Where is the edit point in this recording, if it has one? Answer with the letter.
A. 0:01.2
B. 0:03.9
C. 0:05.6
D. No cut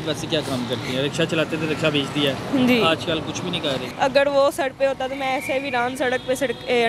B